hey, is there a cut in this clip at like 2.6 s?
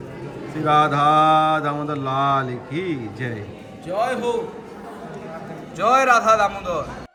no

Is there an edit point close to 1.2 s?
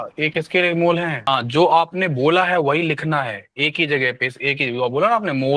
yes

